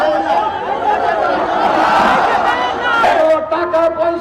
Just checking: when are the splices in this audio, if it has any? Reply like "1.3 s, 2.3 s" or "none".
3.0 s